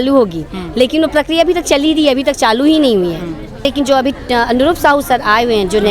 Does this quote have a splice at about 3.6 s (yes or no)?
yes